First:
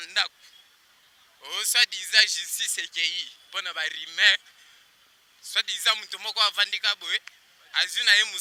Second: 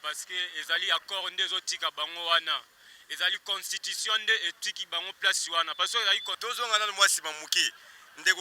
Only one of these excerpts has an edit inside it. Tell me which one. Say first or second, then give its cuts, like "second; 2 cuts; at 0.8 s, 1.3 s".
second; 1 cut; at 6.3 s